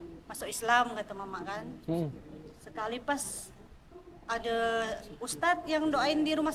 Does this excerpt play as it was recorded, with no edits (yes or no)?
yes